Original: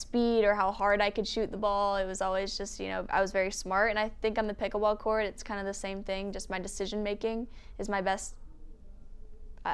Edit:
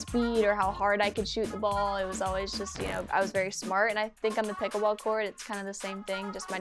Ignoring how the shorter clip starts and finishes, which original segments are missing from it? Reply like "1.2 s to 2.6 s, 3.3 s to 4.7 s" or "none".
none